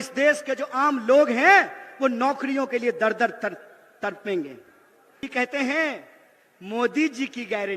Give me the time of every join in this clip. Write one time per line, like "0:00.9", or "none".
0:05.2